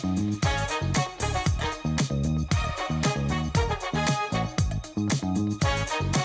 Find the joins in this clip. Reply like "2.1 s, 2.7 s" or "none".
none